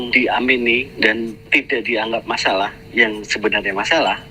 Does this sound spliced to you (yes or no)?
yes